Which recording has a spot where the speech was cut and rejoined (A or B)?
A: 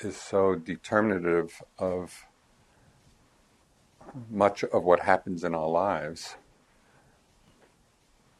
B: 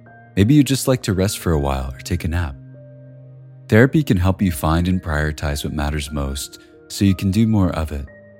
A